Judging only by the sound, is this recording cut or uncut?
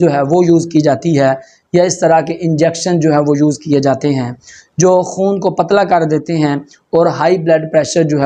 uncut